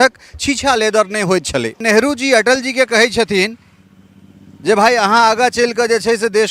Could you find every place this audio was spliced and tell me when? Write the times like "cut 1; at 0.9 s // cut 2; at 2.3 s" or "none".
cut 1; at 1.8 s